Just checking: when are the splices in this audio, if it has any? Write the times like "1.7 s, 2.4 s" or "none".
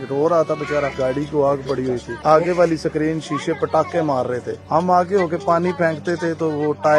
0.9 s, 2.1 s, 4.5 s